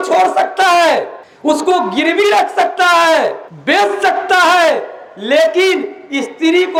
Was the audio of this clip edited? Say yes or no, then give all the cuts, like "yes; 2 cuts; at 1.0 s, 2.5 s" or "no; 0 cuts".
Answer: no; 0 cuts